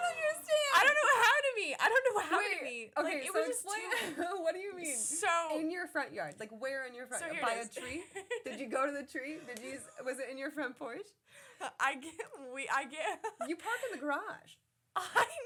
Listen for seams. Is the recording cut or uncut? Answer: uncut